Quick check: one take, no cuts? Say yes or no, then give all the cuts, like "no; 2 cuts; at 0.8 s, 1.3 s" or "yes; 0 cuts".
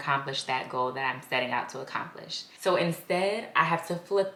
yes; 0 cuts